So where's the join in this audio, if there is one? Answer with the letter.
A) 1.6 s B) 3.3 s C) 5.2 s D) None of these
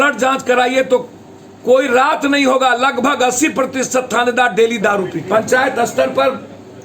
C